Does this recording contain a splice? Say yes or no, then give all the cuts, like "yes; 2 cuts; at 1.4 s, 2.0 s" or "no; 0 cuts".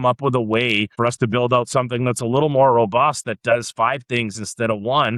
yes; 1 cut; at 0.9 s